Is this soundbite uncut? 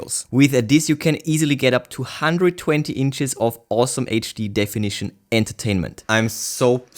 no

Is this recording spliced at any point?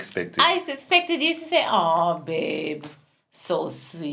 no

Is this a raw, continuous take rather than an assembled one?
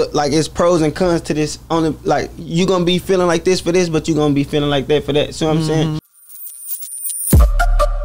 no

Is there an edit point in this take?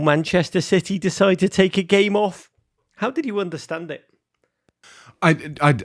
no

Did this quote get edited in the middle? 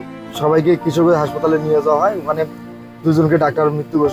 no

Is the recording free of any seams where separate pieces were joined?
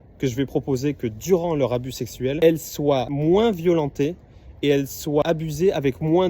no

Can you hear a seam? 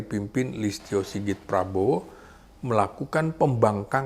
no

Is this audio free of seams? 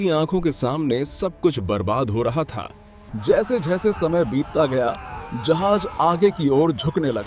yes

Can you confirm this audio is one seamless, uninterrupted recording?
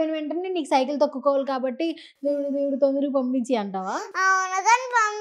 yes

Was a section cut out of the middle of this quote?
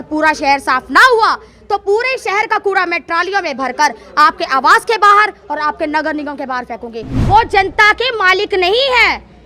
yes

